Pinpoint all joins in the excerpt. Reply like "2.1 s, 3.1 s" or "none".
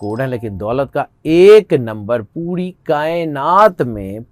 none